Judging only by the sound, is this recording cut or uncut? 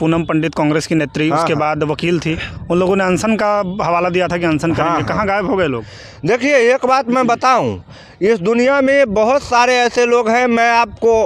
uncut